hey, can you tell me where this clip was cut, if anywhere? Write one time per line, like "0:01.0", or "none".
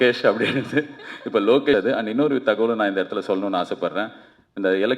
0:01.7